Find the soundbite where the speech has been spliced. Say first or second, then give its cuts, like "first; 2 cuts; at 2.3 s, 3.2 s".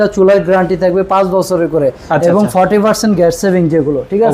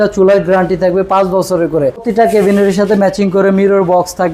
second; 1 cut; at 2.0 s